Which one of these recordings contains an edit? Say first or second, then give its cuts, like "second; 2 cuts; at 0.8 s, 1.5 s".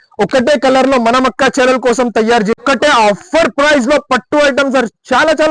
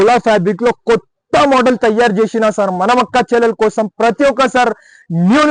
first; 1 cut; at 2.6 s